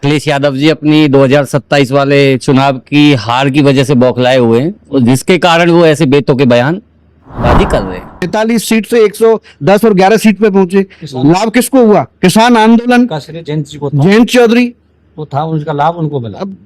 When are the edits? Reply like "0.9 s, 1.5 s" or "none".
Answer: 8.3 s